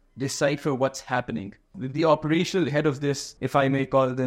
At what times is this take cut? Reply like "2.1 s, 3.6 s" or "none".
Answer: 1.8 s, 3.3 s